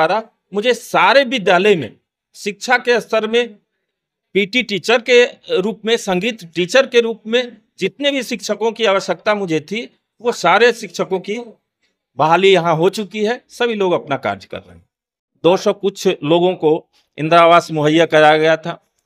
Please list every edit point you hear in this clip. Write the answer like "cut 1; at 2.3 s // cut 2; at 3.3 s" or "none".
cut 1; at 15.3 s